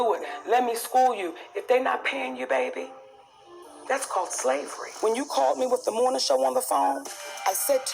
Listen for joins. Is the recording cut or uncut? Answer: cut